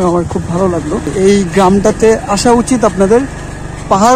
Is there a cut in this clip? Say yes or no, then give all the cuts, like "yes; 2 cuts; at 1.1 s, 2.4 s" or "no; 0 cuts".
yes; 1 cut; at 1.1 s